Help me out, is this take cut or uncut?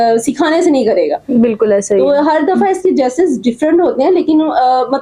uncut